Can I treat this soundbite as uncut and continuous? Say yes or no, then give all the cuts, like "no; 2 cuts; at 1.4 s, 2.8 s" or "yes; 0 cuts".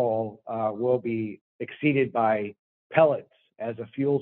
no; 1 cut; at 1.4 s